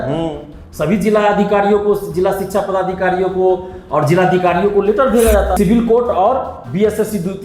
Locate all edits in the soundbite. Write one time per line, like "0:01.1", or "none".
0:05.5